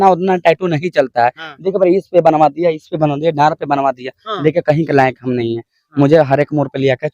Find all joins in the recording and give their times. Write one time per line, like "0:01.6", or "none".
none